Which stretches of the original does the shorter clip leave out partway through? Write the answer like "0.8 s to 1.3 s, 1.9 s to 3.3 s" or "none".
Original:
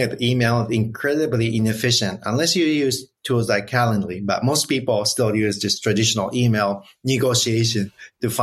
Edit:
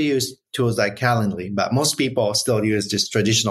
none